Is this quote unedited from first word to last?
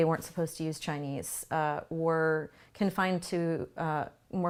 yes; 0 cuts

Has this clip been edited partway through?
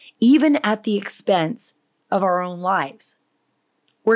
no; 0 cuts

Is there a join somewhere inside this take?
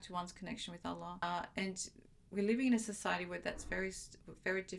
yes; 1 cut; at 1.2 s

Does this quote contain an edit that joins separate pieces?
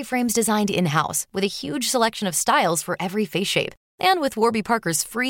no; 0 cuts

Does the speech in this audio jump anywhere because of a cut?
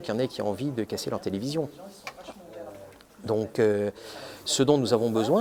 no; 0 cuts

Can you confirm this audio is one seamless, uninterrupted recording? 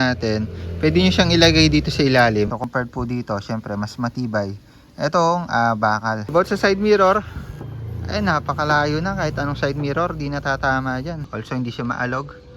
no; 3 cuts; at 2.6 s, 6.2 s, 11.2 s

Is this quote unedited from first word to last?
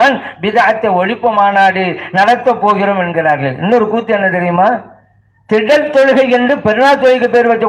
yes; 0 cuts

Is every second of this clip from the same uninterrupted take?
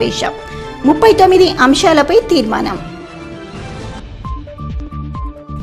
yes; 0 cuts

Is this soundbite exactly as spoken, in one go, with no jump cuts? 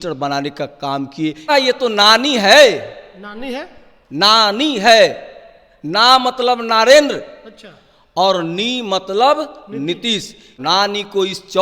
no; 2 cuts; at 1.5 s, 10.5 s

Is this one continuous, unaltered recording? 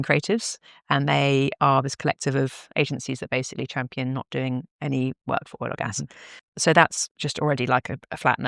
no; 1 cut; at 6.4 s

